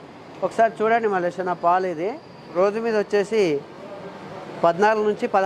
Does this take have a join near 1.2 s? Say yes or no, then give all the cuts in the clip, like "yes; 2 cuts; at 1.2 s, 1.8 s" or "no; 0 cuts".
no; 1 cut; at 2.5 s